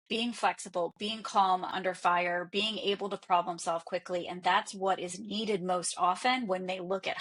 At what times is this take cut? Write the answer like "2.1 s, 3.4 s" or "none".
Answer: 1.7 s